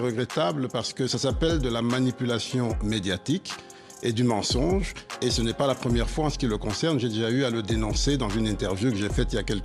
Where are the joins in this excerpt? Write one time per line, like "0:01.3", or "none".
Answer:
none